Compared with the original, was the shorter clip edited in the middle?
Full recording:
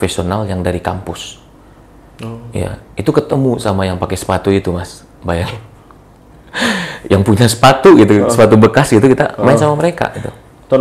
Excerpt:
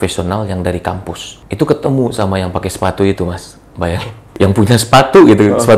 yes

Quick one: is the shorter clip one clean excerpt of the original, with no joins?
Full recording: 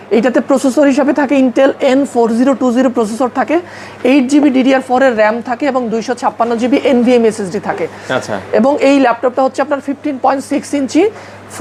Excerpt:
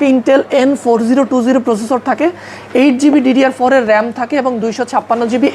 yes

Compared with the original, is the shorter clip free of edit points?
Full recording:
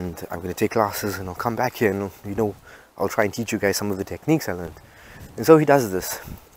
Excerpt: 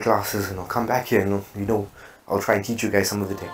yes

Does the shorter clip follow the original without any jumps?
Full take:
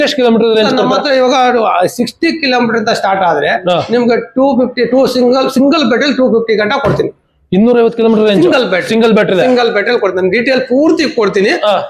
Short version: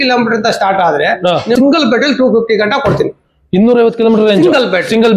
no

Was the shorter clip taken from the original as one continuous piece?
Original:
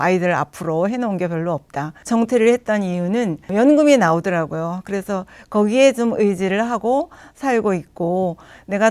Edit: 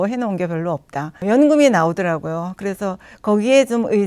no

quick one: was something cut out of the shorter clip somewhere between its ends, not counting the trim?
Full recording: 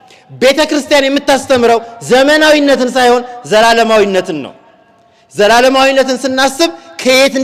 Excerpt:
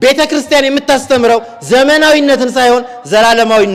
no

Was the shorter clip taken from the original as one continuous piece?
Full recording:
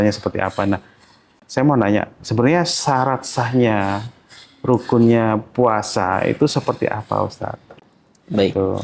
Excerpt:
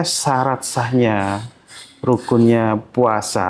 yes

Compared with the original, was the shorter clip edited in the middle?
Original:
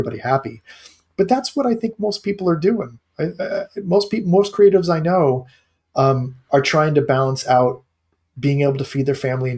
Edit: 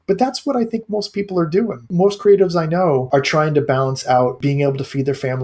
yes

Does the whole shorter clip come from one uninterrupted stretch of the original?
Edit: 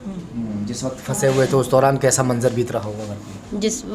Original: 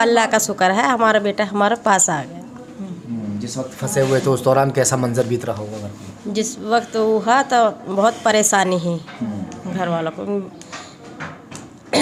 yes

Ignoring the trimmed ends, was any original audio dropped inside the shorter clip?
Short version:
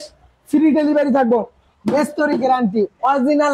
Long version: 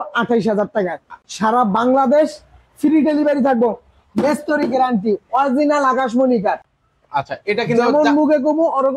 no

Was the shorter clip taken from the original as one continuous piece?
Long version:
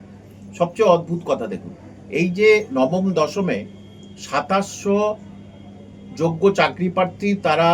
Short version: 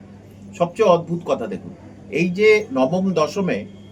yes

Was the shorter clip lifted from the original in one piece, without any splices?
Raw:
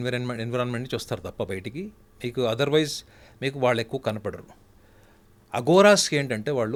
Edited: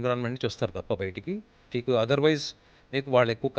yes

